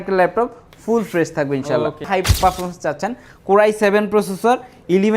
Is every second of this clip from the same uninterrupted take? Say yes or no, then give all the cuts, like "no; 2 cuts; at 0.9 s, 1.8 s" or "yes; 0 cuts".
no; 1 cut; at 2.1 s